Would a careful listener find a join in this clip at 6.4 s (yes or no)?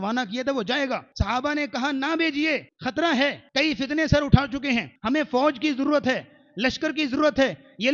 no